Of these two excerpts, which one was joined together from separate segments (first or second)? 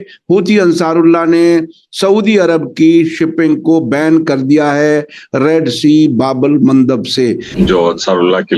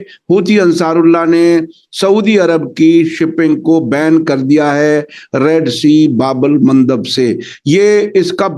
first